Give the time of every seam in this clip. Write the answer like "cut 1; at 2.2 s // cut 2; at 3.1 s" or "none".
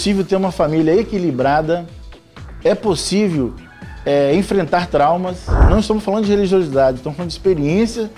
cut 1; at 5.5 s